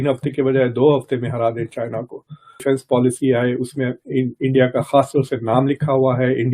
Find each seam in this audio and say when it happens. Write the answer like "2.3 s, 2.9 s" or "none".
none